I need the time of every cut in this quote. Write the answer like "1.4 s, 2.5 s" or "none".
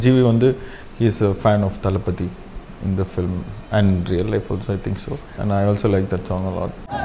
none

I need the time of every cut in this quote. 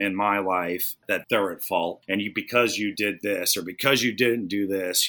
1.0 s, 2.0 s

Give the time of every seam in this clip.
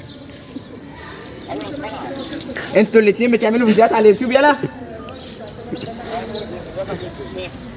none

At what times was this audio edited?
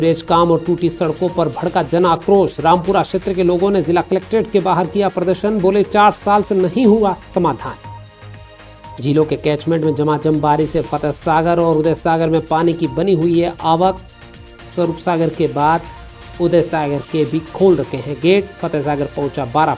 none

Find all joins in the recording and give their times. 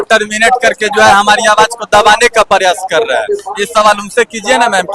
none

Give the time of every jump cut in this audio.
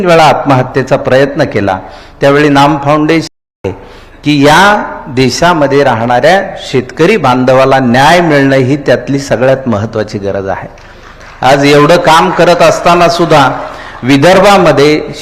3.5 s

